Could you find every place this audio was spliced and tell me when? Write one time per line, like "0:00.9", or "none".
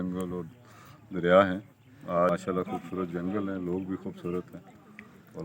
0:02.3